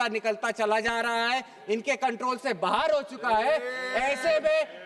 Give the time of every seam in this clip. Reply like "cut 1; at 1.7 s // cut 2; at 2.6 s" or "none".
none